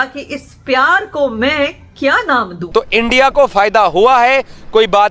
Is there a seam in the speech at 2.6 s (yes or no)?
yes